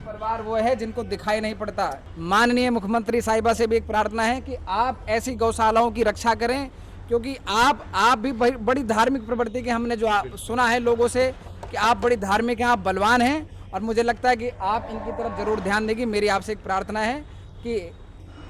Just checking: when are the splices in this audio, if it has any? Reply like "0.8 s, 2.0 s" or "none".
2.1 s